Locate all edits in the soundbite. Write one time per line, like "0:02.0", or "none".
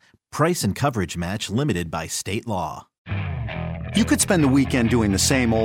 0:03.0